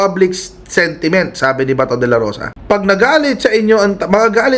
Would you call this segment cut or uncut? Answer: cut